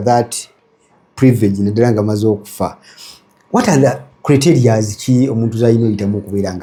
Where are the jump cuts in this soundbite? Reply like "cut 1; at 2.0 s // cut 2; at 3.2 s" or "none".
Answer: none